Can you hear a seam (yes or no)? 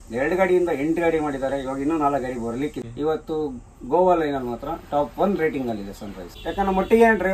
yes